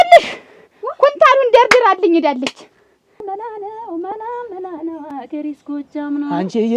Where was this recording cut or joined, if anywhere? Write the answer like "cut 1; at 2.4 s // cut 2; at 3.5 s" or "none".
cut 1; at 3.2 s